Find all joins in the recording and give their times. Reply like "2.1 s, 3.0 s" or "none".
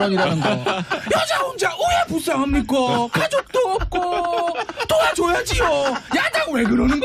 3.6 s